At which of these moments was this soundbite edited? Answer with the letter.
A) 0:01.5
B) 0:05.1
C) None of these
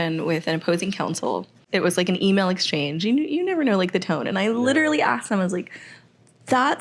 A